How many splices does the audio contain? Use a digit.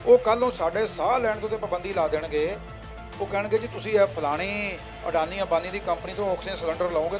0